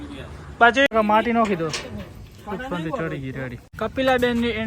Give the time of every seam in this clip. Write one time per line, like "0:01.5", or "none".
0:00.9
0:03.7